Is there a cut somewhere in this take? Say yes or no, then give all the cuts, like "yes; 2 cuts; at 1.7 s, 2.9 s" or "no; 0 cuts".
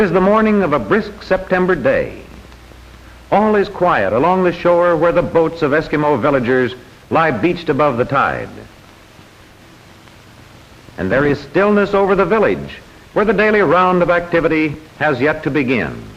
yes; 1 cut; at 1.2 s